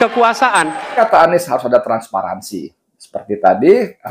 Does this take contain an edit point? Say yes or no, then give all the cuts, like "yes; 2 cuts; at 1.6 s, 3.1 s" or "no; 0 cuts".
yes; 1 cut; at 0.9 s